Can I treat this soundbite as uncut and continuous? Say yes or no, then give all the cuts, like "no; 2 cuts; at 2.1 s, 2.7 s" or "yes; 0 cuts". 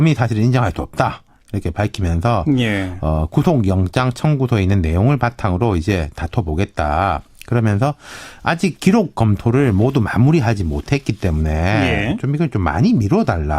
no; 1 cut; at 7.2 s